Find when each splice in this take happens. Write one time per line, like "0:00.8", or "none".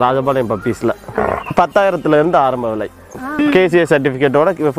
0:01.1
0:03.2